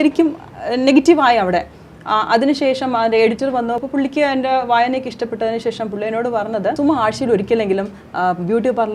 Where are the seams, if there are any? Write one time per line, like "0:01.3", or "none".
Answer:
0:03.8
0:06.8